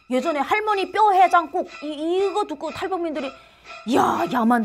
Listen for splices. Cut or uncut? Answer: uncut